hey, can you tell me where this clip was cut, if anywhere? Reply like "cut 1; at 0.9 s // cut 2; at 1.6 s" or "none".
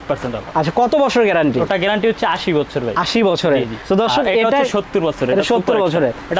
none